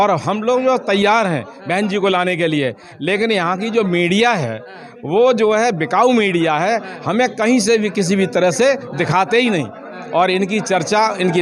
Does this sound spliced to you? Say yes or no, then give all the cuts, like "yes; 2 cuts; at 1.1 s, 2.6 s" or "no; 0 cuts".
no; 0 cuts